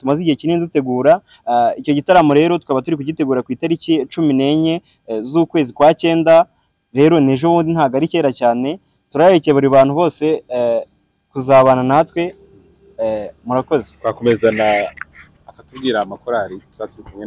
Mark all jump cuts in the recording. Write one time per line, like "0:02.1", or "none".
none